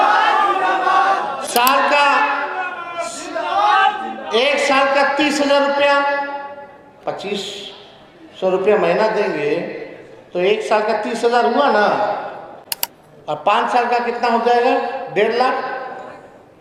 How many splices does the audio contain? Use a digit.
0